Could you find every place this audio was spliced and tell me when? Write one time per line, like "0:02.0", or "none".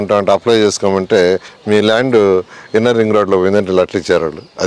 0:01.5